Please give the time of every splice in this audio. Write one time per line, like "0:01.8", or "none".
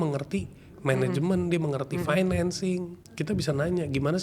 0:03.0